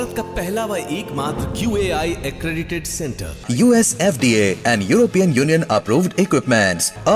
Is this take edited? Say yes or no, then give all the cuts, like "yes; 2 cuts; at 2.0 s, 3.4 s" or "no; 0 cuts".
no; 0 cuts